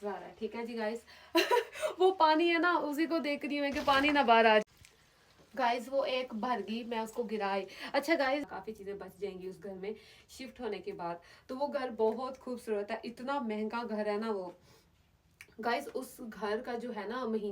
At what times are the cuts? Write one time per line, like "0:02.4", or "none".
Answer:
0:08.4